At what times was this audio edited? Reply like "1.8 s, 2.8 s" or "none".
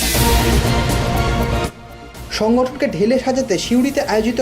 1.4 s